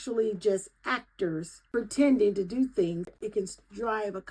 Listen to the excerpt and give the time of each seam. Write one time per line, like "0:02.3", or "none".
0:01.6
0:03.1